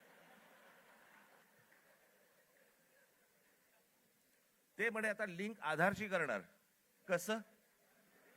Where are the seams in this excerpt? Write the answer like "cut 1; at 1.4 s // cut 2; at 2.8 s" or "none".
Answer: cut 1; at 1.4 s